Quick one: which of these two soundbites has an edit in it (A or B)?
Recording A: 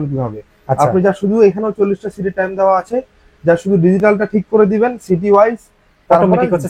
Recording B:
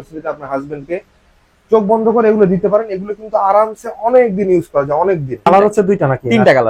B